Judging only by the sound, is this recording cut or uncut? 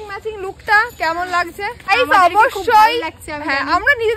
cut